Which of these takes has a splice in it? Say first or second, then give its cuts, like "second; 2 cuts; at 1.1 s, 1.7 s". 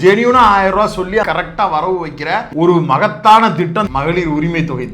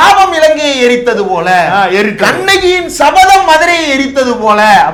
first; 3 cuts; at 1.3 s, 2.5 s, 3.9 s